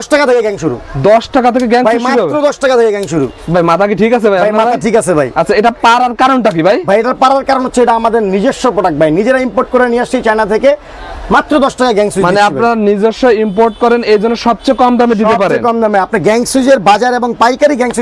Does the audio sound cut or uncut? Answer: uncut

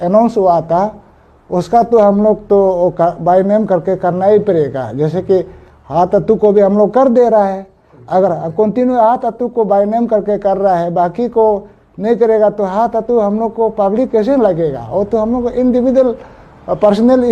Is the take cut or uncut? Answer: uncut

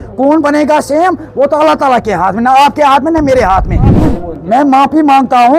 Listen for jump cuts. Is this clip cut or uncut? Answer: cut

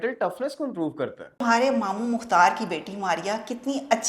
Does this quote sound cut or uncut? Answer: cut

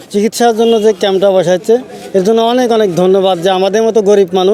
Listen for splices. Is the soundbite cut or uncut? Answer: uncut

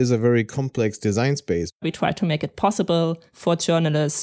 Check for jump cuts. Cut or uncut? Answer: cut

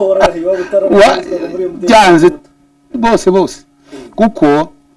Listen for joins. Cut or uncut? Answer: uncut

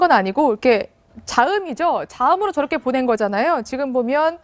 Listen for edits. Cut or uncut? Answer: cut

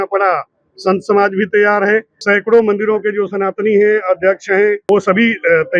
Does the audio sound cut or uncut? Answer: cut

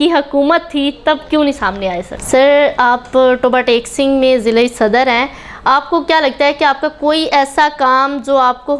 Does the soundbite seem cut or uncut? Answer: cut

